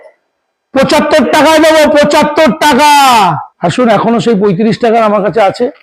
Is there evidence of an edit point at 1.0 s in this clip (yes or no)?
no